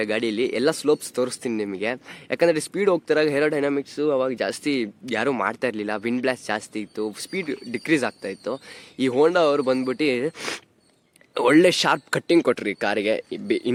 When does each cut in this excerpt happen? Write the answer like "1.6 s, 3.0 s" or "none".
none